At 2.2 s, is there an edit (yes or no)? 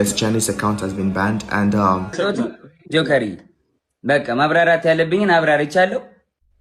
yes